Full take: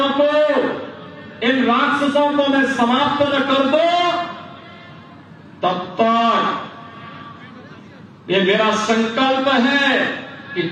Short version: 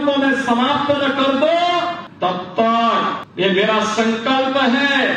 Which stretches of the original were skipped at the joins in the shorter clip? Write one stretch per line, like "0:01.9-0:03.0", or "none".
0:04.4-0:05.5
0:06.6-0:08.1

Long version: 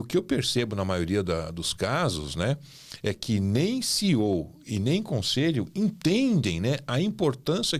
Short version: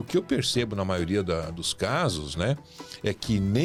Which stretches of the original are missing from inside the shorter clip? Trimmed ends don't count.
none

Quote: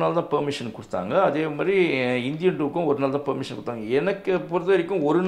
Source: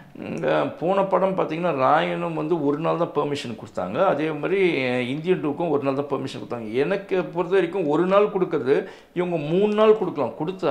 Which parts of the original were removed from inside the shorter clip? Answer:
none

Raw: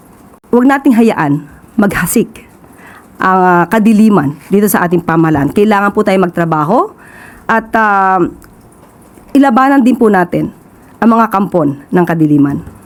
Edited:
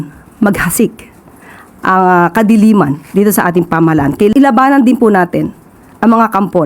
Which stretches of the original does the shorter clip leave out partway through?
0:05.7-0:09.3

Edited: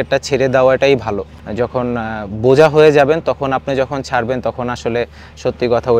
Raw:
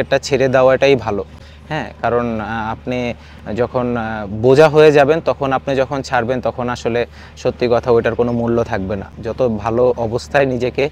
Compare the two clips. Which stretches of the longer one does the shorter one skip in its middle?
0:01.4-0:03.4

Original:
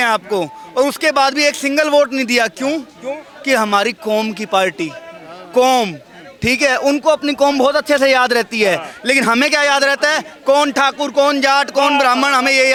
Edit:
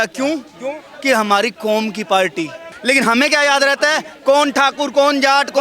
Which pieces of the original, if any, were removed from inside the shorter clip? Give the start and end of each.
0:05.1-0:08.9

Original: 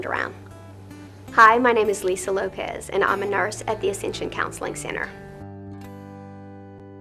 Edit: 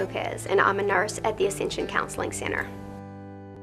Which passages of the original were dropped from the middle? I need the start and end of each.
0:05.1-0:05.9

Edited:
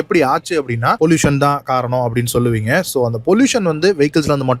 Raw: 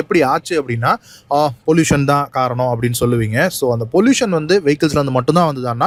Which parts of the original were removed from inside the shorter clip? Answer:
0:00.9-0:01.6

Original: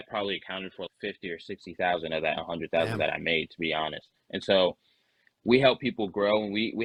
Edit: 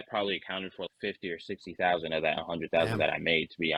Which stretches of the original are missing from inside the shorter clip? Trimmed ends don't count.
none

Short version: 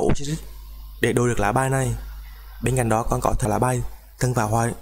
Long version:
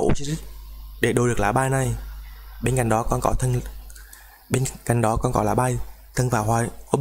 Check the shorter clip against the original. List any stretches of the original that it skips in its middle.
0:03.5-0:05.4

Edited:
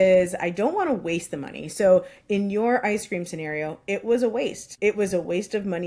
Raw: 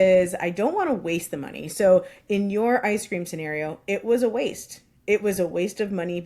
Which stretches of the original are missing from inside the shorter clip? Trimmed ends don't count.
0:04.6-0:04.9

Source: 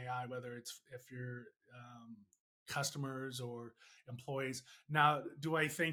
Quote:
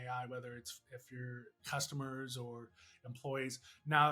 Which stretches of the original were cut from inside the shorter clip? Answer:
0:01.5-0:02.5

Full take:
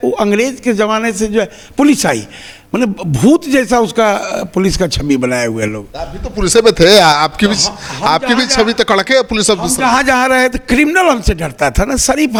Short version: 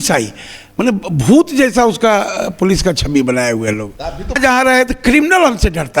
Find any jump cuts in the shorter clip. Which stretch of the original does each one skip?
0:06.3-0:10.0

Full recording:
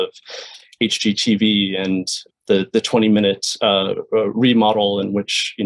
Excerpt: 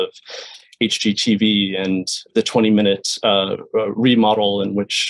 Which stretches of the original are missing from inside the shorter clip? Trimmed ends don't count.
0:02.3-0:02.7

